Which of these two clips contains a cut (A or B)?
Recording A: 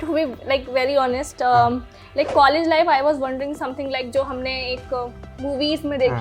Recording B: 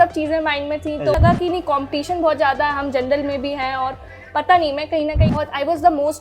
B